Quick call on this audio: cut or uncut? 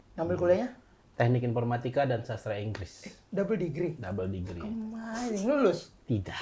cut